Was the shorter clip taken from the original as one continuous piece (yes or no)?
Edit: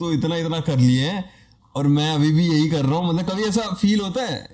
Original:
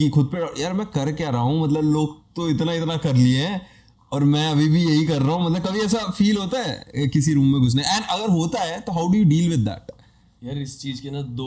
yes